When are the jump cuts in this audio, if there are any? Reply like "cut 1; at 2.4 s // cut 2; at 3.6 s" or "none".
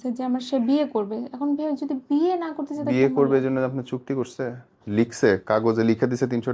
none